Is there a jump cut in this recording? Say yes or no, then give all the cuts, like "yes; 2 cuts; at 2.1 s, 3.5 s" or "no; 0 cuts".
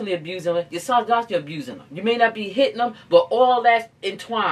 no; 0 cuts